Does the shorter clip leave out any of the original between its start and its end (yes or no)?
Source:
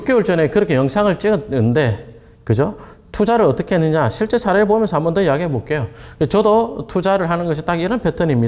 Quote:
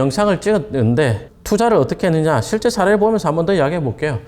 yes